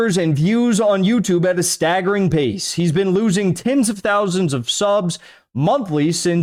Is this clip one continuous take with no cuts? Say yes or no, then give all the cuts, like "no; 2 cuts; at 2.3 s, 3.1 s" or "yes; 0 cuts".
yes; 0 cuts